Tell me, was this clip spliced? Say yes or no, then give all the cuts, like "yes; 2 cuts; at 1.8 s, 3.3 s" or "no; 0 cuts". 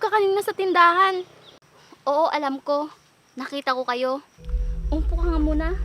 no; 0 cuts